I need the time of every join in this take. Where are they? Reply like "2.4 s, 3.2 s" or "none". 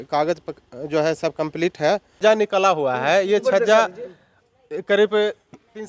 2.2 s